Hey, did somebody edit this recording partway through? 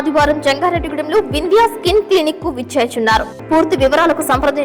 yes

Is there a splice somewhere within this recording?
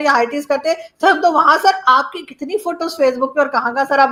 no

